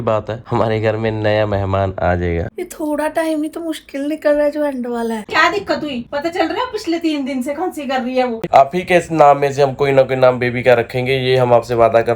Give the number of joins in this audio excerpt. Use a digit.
3